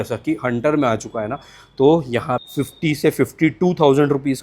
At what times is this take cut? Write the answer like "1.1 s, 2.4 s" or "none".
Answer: 2.4 s